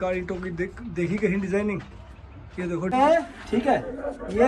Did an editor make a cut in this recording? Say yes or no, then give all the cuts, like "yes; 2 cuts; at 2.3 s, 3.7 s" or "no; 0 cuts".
yes; 1 cut; at 2.9 s